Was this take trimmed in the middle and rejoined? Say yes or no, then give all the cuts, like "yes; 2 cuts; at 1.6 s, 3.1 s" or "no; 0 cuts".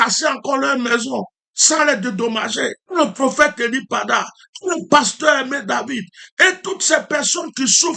yes; 1 cut; at 2.8 s